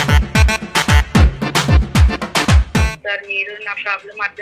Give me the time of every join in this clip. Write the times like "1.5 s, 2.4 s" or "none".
3.0 s